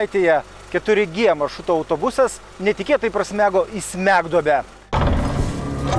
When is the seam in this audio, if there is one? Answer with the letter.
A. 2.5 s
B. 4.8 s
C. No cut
B